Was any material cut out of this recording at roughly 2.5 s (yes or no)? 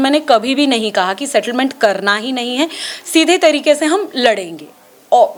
no